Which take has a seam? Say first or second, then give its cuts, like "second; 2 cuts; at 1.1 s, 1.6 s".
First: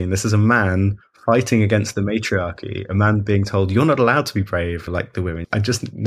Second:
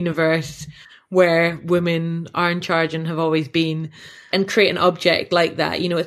first; 1 cut; at 4.9 s